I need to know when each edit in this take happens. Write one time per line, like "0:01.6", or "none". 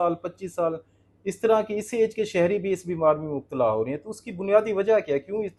none